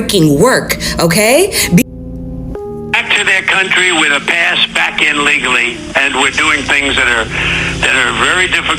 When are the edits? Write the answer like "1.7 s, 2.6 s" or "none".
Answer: 1.8 s